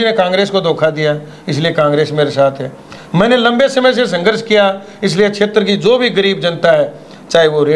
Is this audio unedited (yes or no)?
yes